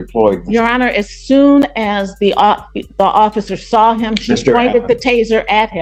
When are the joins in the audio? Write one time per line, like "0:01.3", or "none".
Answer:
none